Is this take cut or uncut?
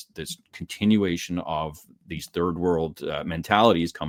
uncut